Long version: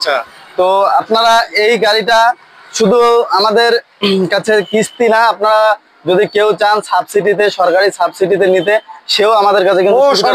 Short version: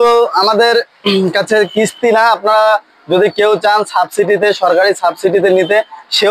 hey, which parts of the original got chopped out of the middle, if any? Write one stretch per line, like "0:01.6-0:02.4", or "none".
none